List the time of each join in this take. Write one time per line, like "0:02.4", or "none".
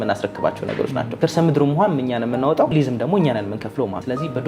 0:01.2
0:02.7

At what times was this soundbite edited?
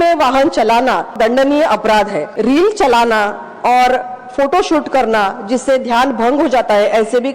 0:01.1
0:02.3

